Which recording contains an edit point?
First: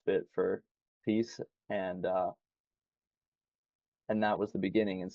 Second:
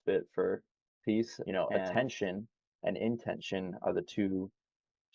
second; 1 cut; at 1.9 s

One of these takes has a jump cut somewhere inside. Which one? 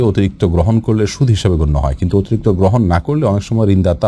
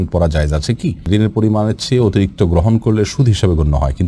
second; 1 cut; at 1.0 s

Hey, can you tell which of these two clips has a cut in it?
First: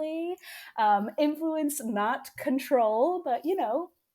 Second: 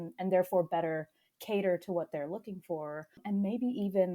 second; 1 cut; at 3.2 s

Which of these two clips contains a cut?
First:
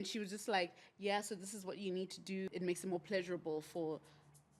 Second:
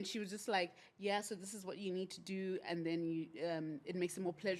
first; 1 cut; at 2.5 s

